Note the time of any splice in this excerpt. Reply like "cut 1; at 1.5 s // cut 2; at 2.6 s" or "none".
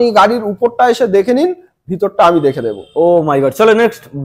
none